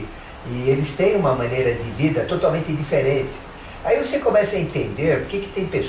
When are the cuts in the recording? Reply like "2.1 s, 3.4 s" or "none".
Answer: none